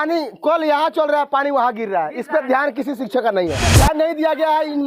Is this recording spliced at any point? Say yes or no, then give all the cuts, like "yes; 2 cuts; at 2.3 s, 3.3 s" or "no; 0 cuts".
yes; 1 cut; at 3.7 s